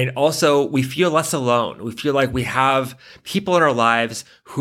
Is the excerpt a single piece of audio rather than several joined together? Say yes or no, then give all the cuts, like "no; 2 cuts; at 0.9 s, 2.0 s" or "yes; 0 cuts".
yes; 0 cuts